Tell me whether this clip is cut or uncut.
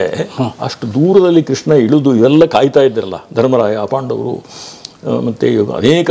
uncut